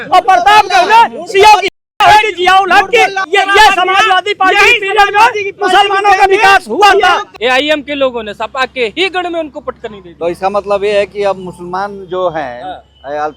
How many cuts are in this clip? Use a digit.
2